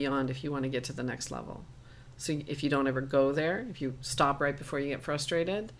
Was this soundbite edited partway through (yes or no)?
no